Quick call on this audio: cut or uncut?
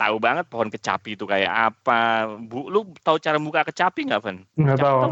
uncut